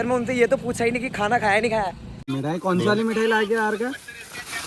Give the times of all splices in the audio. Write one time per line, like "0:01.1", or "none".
0:02.0